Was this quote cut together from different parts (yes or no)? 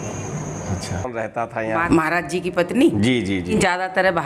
yes